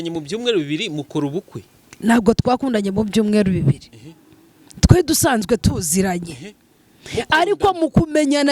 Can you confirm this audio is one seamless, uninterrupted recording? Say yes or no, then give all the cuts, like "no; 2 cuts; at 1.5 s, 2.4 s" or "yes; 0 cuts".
yes; 0 cuts